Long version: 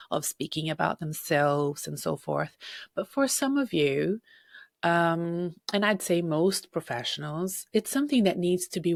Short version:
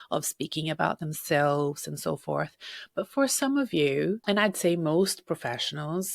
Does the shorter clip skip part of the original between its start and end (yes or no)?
yes